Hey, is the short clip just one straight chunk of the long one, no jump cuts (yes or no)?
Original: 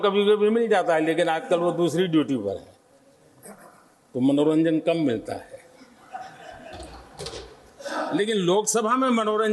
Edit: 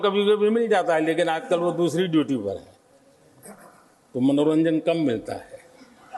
yes